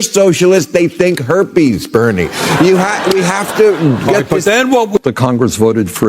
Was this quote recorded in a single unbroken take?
no; 1 cut; at 5.0 s

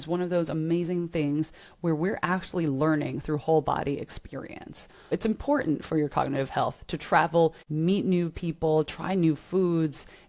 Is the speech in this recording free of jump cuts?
no; 2 cuts; at 5.1 s, 7.7 s

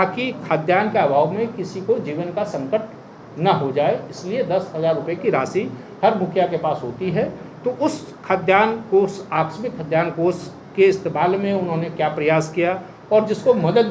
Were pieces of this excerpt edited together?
no; 0 cuts

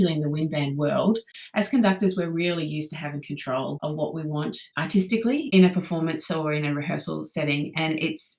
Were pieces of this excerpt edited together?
yes; 3 cuts; at 1.4 s, 3.8 s, 5.1 s

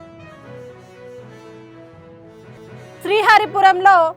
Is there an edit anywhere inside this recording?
no; 0 cuts

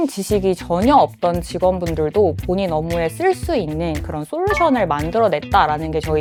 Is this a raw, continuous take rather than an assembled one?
yes; 0 cuts

